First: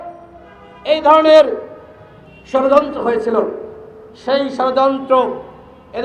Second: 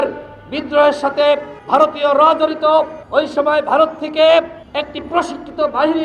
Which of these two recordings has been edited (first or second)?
second